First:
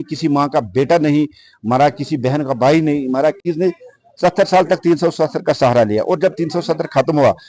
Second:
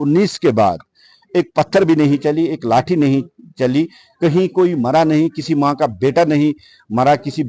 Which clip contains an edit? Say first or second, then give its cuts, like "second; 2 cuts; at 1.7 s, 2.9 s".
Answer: first; 1 cut; at 3.5 s